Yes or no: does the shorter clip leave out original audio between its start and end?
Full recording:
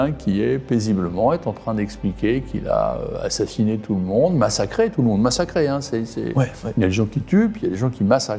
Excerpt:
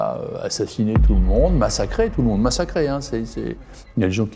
no